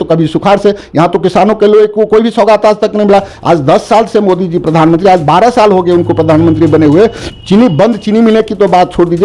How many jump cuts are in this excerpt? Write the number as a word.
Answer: zero